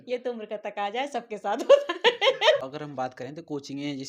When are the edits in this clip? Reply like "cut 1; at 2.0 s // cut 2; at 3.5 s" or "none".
cut 1; at 2.6 s